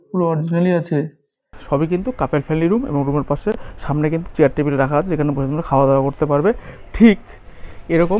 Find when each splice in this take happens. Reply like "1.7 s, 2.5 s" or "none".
1.5 s